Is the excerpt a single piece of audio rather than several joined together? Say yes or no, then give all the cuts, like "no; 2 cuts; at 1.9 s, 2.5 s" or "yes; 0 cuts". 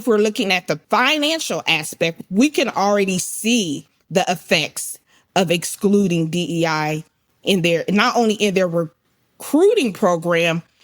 no; 2 cuts; at 0.8 s, 2.1 s